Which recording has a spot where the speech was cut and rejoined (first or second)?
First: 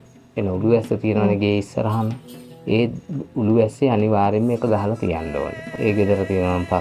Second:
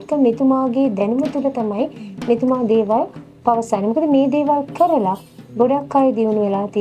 first